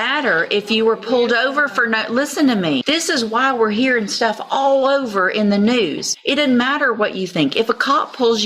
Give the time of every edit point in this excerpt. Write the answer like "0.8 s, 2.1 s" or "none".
2.8 s, 6.1 s